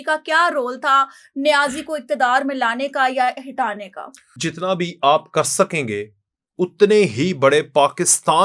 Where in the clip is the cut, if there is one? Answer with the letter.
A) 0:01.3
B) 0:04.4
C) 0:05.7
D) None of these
B